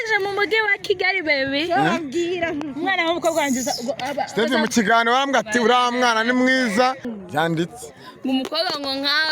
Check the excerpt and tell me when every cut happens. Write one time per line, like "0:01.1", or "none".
0:07.1